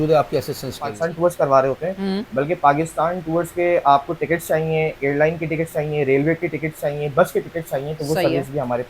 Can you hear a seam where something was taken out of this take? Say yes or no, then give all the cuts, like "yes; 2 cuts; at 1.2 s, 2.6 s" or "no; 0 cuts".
yes; 1 cut; at 1.0 s